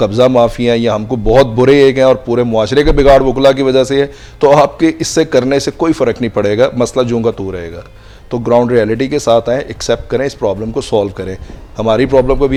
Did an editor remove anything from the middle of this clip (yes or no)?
no